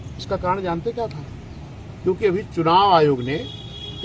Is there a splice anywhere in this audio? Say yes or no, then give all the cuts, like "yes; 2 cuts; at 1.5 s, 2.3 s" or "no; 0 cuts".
no; 0 cuts